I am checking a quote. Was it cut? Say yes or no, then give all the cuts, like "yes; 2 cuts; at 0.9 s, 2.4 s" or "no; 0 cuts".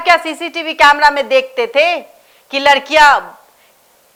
no; 0 cuts